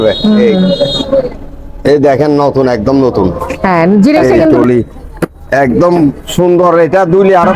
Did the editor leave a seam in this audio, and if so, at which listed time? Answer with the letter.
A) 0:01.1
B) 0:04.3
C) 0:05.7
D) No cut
B